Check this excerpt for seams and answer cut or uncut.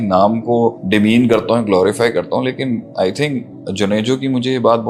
uncut